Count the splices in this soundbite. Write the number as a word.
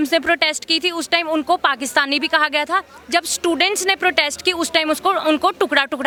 zero